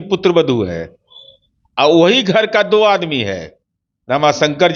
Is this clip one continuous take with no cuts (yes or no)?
yes